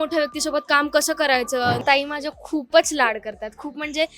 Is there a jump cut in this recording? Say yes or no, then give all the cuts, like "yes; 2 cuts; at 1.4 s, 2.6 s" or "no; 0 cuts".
yes; 1 cut; at 1.8 s